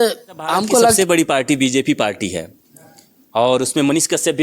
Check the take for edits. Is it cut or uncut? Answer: cut